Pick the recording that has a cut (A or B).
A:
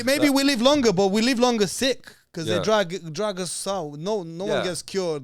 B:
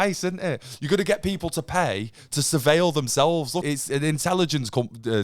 B